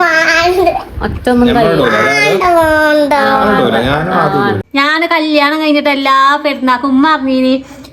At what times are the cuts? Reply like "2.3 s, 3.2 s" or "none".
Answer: 4.6 s